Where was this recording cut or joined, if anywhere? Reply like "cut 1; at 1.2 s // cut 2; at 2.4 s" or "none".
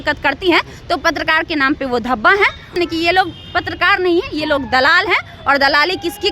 cut 1; at 2.7 s